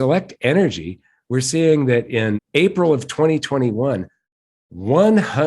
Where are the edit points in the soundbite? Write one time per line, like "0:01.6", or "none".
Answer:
0:02.4